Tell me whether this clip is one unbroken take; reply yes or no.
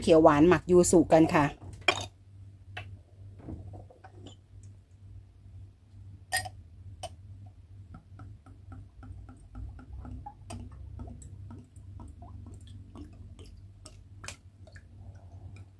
no